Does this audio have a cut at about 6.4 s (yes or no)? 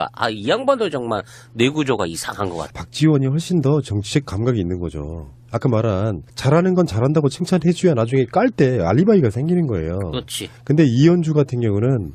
no